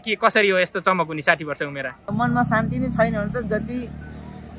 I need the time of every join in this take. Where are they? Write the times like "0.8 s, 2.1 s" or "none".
2.0 s